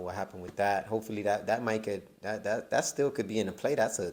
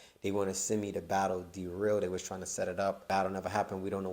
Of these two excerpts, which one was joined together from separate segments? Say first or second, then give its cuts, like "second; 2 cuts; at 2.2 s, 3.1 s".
second; 1 cut; at 3.0 s